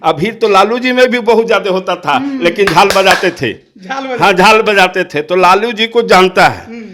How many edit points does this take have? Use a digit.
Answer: 0